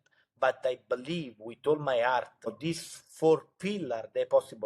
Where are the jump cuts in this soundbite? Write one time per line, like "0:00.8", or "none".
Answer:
0:02.6